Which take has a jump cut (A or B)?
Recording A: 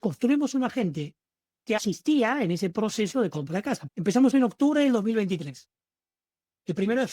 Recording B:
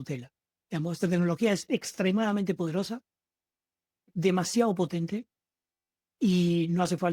A